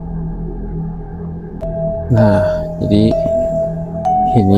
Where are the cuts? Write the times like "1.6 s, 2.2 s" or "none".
1.7 s

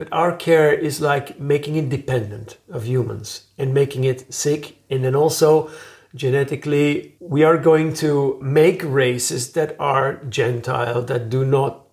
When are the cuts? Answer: none

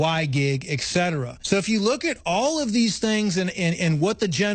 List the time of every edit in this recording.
1.3 s

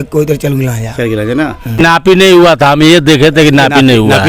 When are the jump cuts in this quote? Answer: 1.8 s

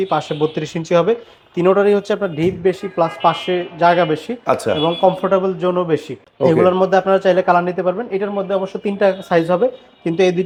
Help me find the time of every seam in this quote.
none

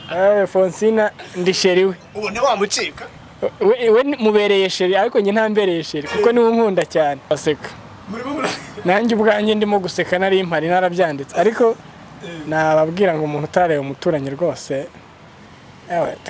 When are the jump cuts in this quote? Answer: 7.3 s

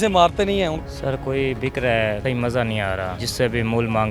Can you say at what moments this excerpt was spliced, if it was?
0.8 s, 2.2 s, 3.2 s

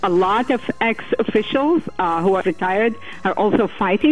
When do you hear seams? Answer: 2.4 s

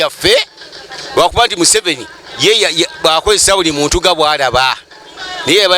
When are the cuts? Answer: none

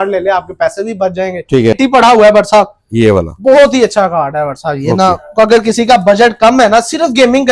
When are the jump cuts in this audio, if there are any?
1.7 s

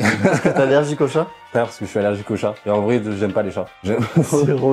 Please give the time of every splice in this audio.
none

